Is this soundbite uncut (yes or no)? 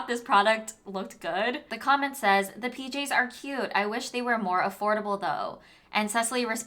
no